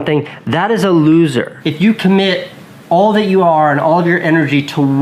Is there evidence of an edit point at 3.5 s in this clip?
no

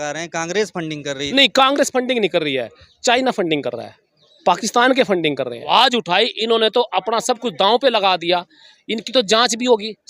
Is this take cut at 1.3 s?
yes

